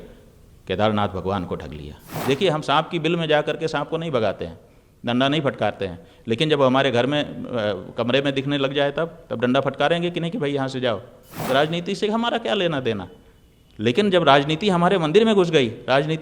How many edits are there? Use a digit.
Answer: 2